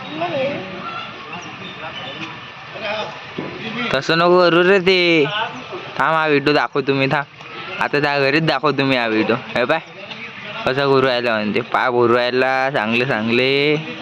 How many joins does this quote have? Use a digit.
0